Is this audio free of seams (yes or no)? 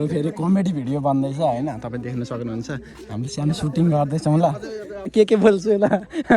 no